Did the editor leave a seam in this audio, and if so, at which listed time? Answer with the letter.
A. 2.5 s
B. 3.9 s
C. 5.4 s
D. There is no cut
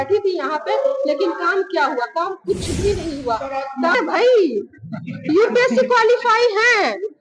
B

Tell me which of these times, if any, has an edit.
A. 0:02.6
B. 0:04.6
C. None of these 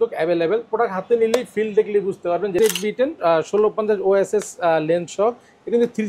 A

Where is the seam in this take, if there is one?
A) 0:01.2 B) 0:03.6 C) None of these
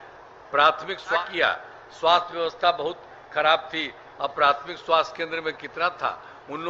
A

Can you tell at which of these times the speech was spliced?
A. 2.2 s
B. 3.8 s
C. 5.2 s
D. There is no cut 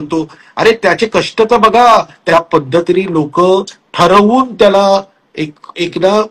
A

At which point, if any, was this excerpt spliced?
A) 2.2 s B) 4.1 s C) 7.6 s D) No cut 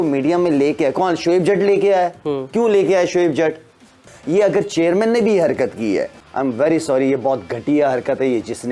B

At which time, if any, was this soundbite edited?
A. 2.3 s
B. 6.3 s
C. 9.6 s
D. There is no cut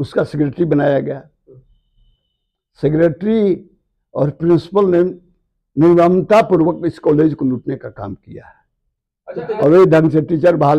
C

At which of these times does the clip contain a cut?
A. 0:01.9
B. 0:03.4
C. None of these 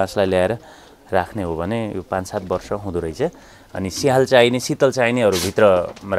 B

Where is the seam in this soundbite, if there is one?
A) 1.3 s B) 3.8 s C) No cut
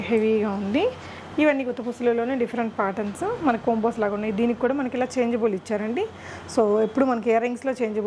C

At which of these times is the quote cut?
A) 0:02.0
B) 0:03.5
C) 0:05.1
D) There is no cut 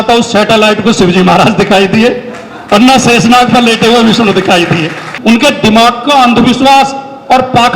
C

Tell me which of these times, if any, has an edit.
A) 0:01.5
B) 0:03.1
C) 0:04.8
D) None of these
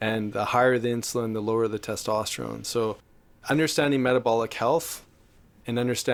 D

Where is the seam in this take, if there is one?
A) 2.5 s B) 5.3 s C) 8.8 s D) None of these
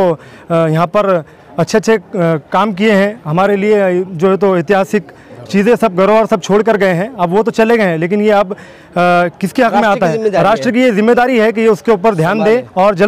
D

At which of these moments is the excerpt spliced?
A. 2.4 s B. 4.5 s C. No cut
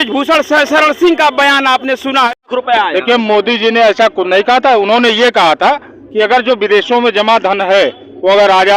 A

